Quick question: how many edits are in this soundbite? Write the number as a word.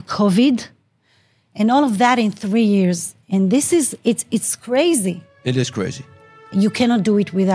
two